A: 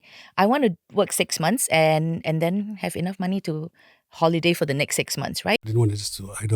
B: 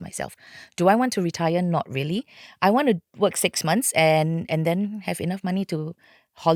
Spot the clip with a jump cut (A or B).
A